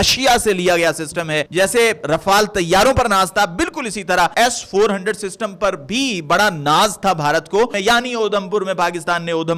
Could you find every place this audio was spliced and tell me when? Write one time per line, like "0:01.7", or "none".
0:01.4
0:04.3
0:07.8